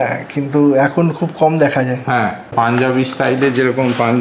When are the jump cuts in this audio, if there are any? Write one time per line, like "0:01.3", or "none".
0:02.5